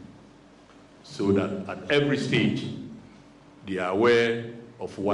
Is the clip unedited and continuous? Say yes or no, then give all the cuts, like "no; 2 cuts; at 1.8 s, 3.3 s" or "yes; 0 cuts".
yes; 0 cuts